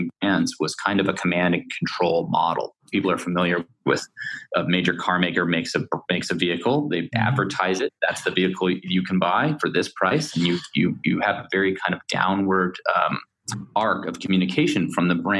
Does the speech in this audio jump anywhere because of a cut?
yes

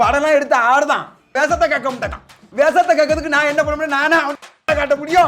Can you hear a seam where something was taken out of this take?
yes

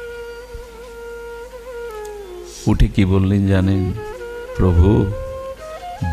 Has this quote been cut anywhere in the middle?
no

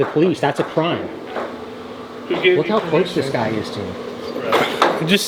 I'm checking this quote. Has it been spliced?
no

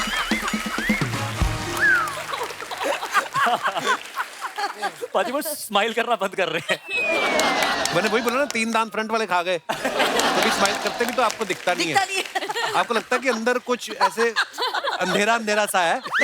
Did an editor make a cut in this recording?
no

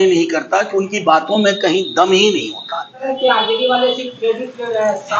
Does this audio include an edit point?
yes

